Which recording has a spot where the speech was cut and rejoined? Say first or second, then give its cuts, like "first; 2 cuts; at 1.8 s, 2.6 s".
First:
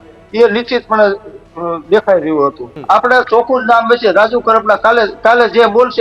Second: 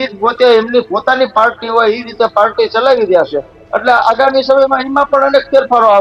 first; 1 cut; at 2.7 s